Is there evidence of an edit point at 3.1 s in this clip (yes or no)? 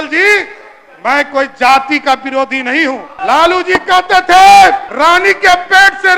yes